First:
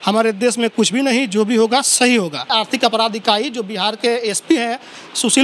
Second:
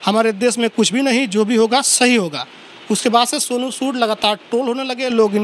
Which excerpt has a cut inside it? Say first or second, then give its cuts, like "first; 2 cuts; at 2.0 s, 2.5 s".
first; 1 cut; at 2.4 s